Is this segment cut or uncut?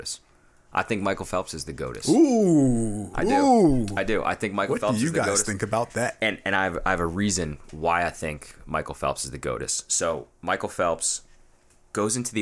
uncut